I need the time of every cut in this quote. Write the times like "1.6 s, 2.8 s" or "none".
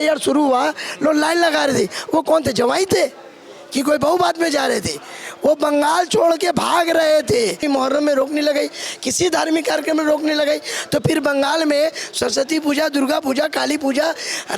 7.6 s